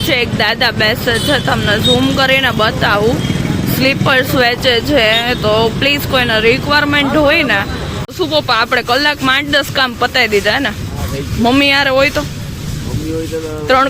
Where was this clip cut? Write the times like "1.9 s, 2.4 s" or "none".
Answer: 7.9 s